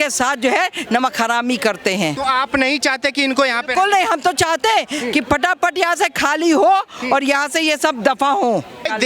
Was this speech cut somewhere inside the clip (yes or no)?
no